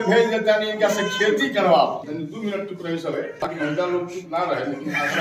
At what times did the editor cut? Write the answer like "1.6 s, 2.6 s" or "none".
2.0 s